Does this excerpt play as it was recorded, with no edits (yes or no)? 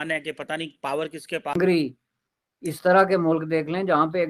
yes